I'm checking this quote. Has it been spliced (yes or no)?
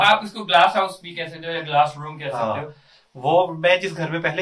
no